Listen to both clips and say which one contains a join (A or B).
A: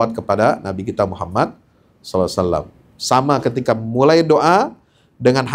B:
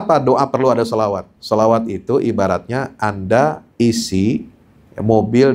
B